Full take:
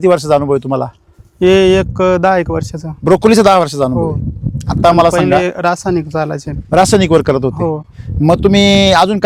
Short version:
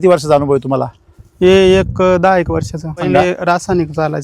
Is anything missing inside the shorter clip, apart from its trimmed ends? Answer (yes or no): yes